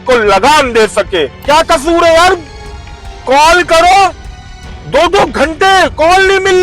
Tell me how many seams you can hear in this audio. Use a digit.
1